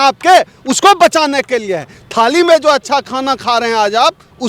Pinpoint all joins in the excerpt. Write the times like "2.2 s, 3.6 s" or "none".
none